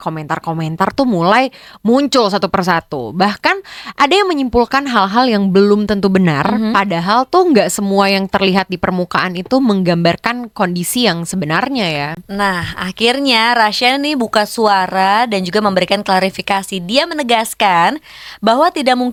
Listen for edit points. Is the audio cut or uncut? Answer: uncut